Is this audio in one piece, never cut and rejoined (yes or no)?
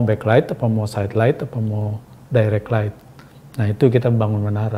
yes